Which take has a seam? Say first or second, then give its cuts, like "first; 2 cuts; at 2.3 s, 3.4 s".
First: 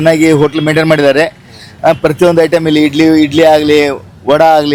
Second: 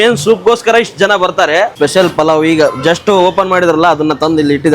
second; 1 cut; at 1.7 s